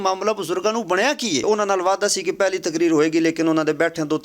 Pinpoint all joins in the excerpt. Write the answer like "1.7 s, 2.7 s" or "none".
1.4 s